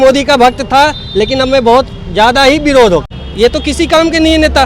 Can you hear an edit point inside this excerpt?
yes; 1 cut; at 3.1 s

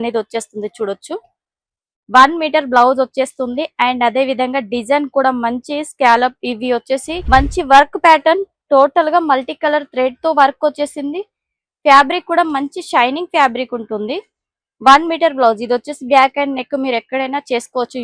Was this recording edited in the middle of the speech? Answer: yes; 1 cut; at 7.1 s

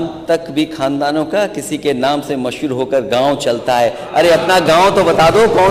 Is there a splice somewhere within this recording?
no; 0 cuts

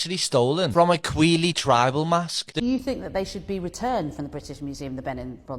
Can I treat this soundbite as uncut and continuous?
no; 1 cut; at 2.4 s

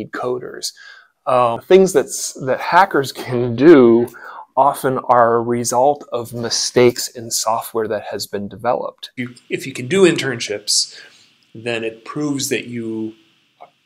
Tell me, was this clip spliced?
yes; 2 cuts; at 1.6 s, 9.1 s

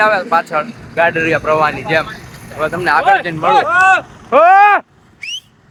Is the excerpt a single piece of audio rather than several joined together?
yes; 0 cuts

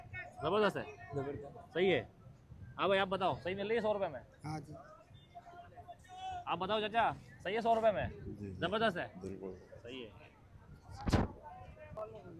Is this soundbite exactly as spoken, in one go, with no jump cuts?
yes; 0 cuts

